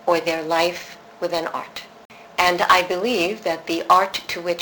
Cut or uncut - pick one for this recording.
cut